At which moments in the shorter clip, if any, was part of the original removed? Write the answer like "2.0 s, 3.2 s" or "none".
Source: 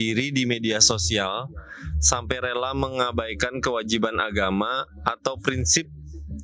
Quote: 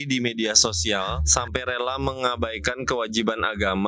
1.2 s